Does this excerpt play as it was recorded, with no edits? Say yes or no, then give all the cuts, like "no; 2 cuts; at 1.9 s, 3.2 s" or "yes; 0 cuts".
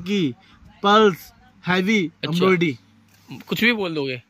yes; 0 cuts